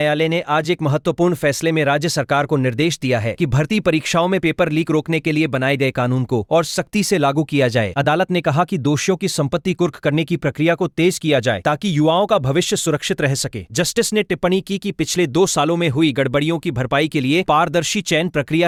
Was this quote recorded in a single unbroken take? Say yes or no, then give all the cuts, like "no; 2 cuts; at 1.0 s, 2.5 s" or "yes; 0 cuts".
yes; 0 cuts